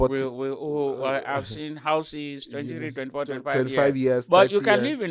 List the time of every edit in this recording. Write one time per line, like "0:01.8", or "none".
none